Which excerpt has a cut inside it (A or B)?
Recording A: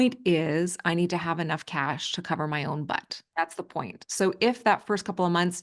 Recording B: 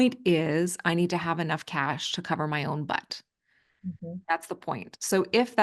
A